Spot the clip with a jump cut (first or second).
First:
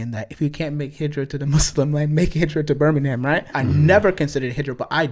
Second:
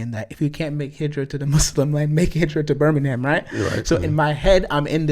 first